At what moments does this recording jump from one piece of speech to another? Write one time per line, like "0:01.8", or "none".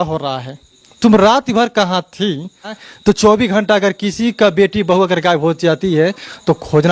0:02.8